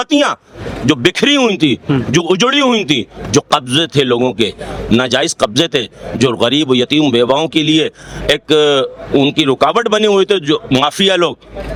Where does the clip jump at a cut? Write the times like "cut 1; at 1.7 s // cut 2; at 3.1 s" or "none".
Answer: none